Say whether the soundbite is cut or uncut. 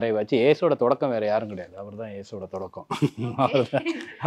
uncut